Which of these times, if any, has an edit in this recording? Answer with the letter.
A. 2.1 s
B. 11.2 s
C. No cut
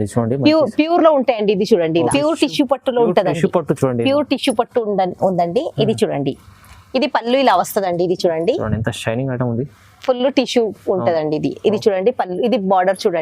A